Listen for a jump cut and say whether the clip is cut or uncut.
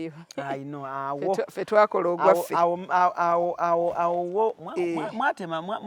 uncut